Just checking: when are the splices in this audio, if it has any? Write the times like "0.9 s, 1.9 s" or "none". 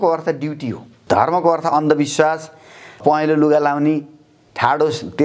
0.9 s, 3.0 s